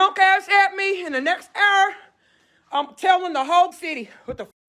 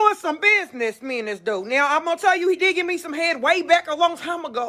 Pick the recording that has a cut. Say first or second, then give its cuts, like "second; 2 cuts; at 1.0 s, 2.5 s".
first; 1 cut; at 3.7 s